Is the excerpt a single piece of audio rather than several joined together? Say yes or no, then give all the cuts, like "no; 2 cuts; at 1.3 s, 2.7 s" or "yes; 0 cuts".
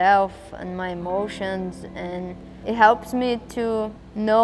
yes; 0 cuts